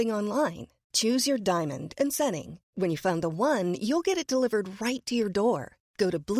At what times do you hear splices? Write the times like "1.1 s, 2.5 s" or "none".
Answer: none